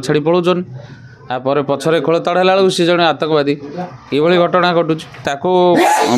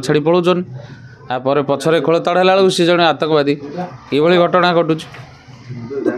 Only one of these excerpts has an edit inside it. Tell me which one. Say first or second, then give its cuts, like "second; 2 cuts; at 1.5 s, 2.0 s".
first; 1 cut; at 5.3 s